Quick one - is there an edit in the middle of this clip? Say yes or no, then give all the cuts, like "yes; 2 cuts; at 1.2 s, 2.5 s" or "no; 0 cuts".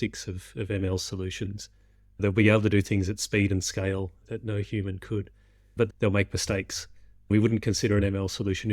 yes; 3 cuts; at 2.2 s, 5.9 s, 7.3 s